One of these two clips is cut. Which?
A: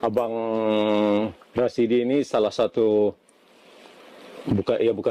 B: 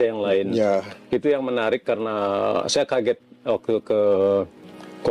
A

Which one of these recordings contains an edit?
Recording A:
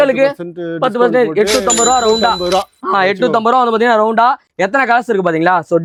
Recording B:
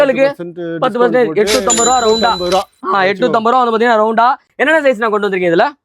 B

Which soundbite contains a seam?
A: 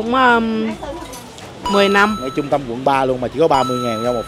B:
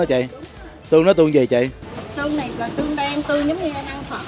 A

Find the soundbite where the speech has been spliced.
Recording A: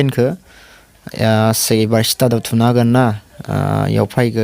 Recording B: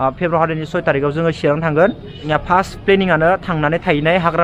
B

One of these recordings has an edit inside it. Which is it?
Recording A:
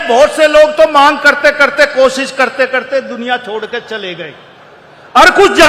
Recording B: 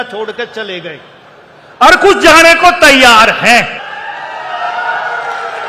B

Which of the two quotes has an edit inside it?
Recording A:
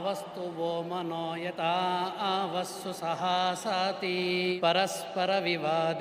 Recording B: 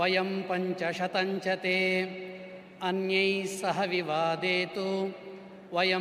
A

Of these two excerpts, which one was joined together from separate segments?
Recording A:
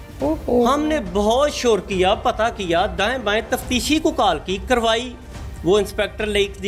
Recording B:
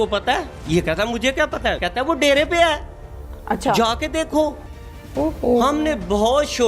B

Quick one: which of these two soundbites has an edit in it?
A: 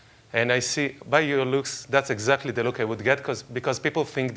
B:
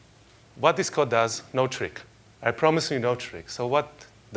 A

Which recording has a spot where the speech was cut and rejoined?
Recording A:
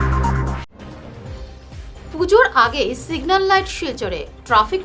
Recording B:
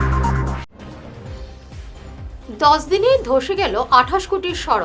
B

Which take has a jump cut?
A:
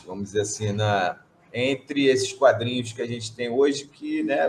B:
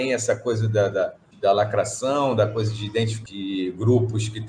B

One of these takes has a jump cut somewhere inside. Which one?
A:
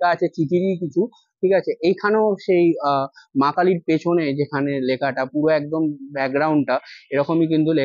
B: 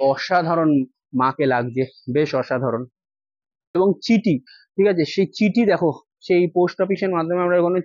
B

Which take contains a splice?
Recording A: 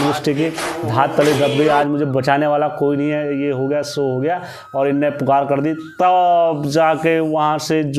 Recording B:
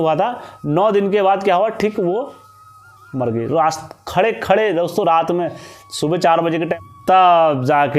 B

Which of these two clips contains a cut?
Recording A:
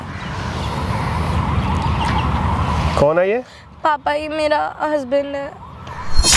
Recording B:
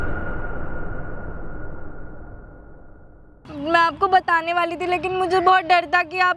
B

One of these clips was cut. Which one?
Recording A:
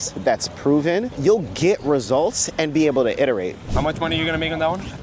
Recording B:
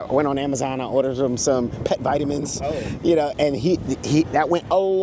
A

